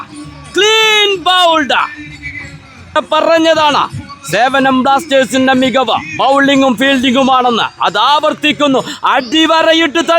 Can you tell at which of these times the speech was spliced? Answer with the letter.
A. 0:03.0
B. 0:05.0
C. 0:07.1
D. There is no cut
A